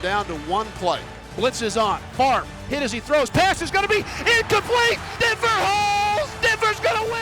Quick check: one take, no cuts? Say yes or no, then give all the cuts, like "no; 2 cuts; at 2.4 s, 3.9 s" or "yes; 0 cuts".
no; 3 cuts; at 1.3 s, 5.1 s, 6.3 s